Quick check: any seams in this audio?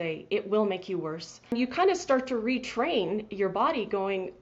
yes; 1 cut; at 1.5 s

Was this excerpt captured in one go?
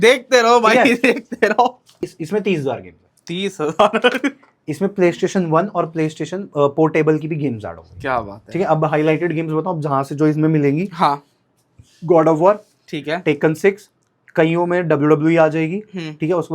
no; 1 cut; at 1.9 s

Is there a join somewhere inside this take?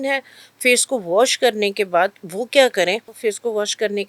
yes; 1 cut; at 3.1 s

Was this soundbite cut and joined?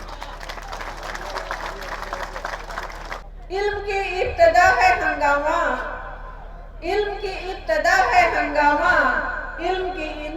yes; 1 cut; at 3.2 s

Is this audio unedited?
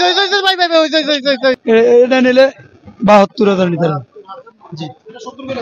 no; 1 cut; at 1.6 s

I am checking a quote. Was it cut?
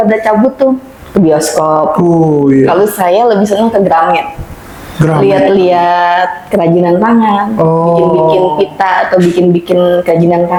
no; 0 cuts

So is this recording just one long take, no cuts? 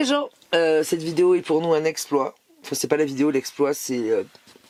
yes; 0 cuts

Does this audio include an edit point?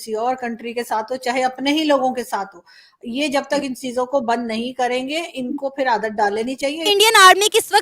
yes; 1 cut; at 6.8 s

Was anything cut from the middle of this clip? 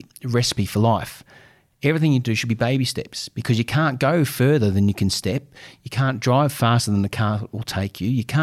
no; 0 cuts

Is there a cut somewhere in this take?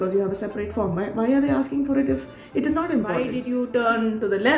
yes; 1 cut; at 3.4 s

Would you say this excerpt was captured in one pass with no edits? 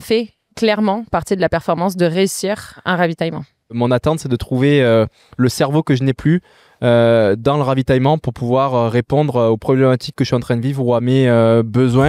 no; 2 cuts; at 2.8 s, 3.8 s

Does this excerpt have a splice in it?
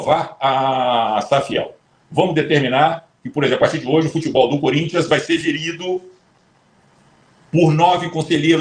no; 0 cuts

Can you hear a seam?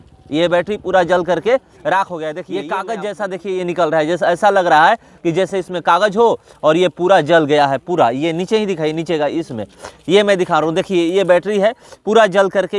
yes; 1 cut; at 2.5 s

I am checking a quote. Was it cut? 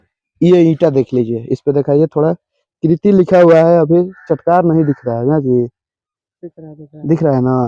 no; 0 cuts

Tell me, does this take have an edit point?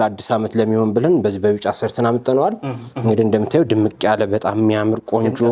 no; 0 cuts

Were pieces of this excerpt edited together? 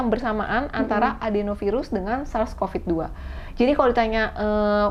no; 0 cuts

